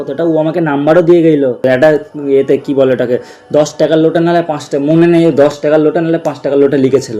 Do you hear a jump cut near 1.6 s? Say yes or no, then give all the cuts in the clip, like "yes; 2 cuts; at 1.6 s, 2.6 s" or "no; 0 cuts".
yes; 1 cut; at 1.6 s